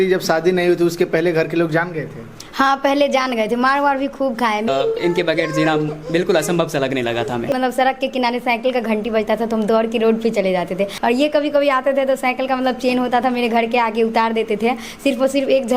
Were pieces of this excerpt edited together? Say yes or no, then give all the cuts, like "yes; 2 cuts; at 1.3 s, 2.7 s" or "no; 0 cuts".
yes; 3 cuts; at 4.7 s, 7.5 s, 10.9 s